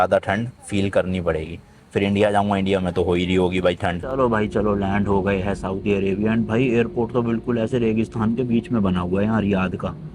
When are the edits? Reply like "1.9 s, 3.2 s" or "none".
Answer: 4.0 s